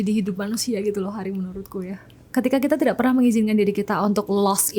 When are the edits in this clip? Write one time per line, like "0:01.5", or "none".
none